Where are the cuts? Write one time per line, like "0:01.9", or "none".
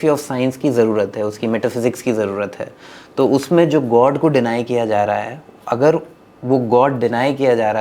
none